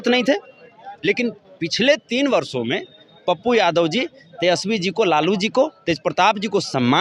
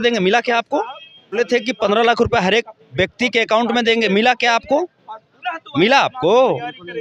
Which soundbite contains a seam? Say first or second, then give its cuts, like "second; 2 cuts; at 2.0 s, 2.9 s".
second; 1 cut; at 1.3 s